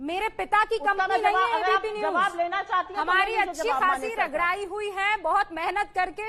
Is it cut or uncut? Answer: uncut